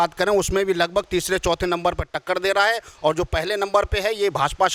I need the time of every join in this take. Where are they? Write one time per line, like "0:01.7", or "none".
none